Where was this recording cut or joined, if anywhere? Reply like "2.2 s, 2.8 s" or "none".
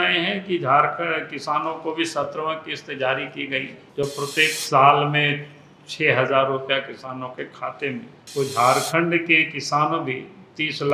none